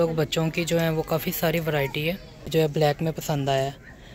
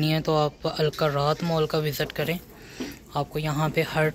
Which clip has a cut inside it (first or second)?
first